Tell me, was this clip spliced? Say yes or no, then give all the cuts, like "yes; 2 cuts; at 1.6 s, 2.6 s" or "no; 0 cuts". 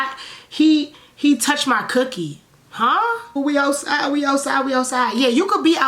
yes; 1 cut; at 3.3 s